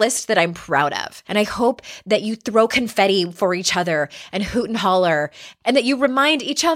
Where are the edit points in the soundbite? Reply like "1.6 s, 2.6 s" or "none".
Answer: 1.1 s, 5.4 s